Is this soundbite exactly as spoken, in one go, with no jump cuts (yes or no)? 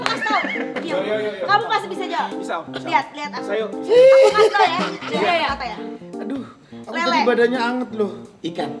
yes